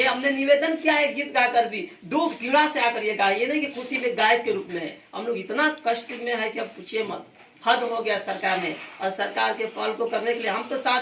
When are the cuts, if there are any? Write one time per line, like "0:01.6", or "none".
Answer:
none